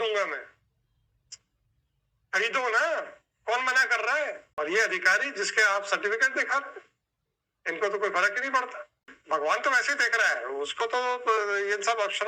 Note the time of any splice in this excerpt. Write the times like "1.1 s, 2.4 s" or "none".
4.4 s, 9.1 s

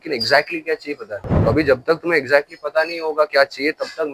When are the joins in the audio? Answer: 1.3 s

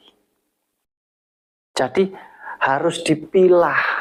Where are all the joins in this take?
none

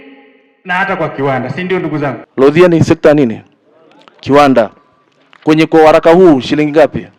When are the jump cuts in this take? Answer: 2.2 s

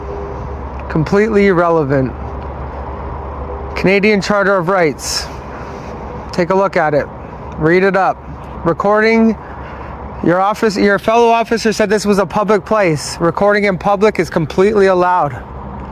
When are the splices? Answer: none

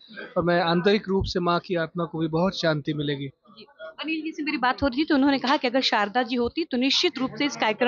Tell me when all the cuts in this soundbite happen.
none

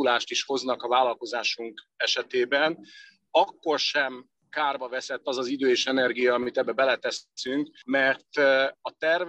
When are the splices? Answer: 7.6 s

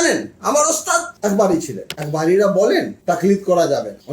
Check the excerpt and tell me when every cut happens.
1.8 s

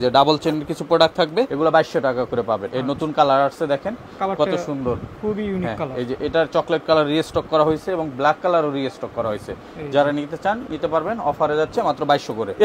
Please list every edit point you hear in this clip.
none

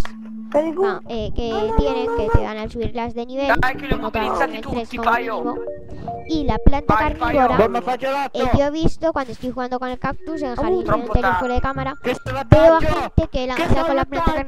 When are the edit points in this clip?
12.0 s

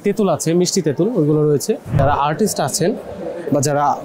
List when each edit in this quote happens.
2.0 s

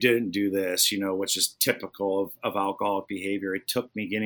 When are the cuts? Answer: none

